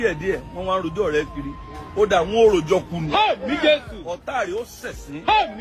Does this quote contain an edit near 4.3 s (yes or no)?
no